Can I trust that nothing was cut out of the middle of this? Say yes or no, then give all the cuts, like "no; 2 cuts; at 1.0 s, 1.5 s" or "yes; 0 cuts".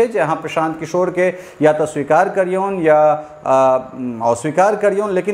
yes; 0 cuts